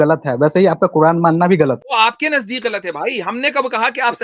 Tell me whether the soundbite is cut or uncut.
cut